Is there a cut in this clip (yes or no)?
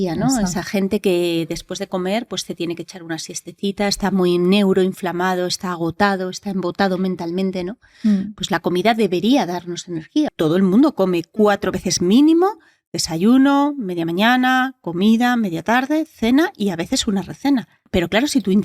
yes